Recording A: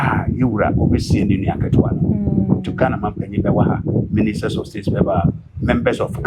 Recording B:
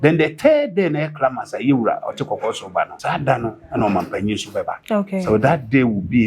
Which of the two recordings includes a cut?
B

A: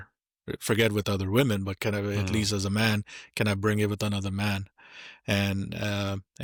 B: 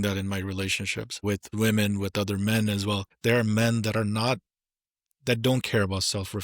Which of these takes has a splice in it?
B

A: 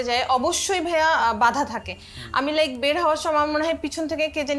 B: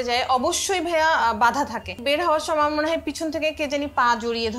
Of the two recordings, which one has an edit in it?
B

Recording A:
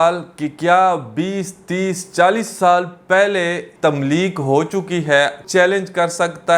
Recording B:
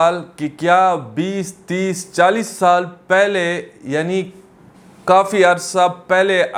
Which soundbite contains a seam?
A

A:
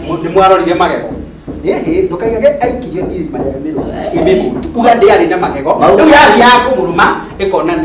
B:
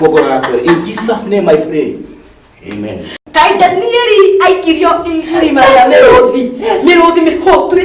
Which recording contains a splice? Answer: B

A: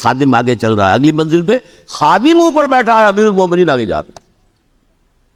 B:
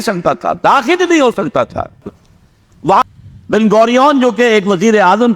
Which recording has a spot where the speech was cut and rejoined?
B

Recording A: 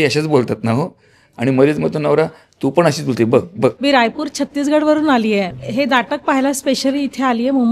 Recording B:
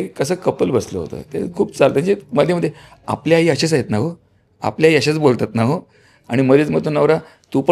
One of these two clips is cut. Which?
A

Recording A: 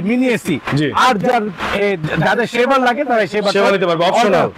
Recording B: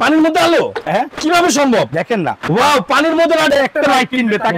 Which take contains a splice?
B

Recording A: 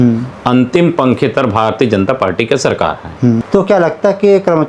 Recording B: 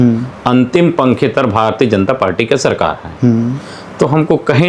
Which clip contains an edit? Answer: A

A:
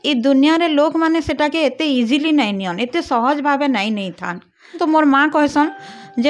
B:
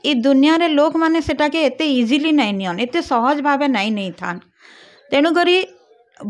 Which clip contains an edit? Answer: A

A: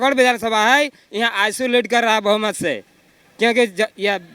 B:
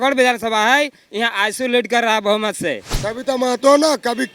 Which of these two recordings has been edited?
B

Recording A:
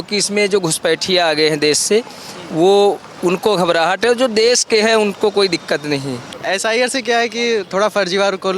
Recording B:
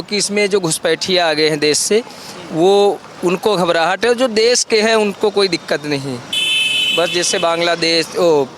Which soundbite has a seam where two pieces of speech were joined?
A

